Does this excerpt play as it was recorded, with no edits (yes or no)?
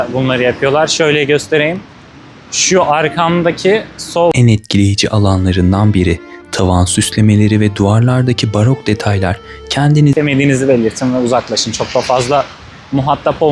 no